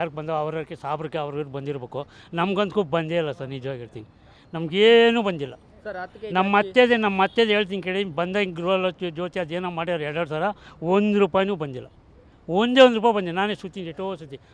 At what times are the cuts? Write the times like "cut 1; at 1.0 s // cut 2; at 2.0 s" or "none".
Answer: none

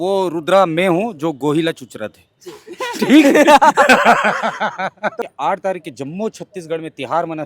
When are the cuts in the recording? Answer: cut 1; at 5.2 s

